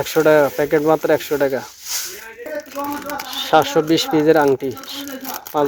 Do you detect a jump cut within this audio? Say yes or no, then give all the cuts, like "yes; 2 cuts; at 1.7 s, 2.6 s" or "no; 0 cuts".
no; 0 cuts